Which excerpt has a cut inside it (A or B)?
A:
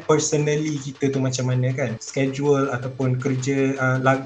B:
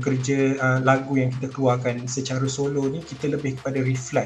A